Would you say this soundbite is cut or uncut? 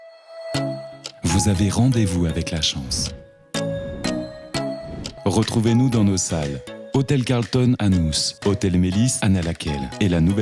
uncut